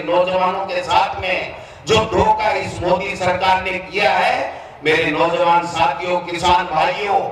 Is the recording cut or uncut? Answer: uncut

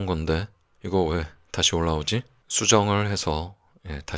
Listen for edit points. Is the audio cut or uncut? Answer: cut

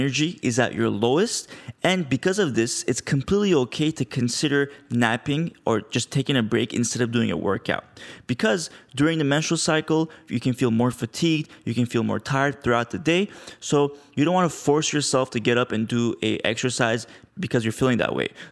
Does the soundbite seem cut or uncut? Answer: uncut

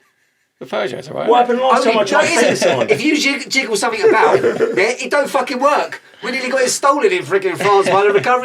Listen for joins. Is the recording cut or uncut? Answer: uncut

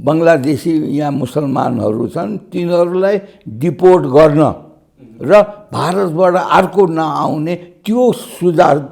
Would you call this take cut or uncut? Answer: uncut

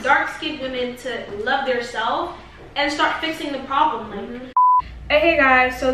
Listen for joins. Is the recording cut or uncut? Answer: uncut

